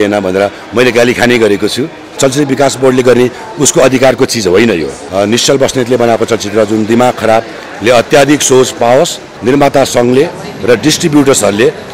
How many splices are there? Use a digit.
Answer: 3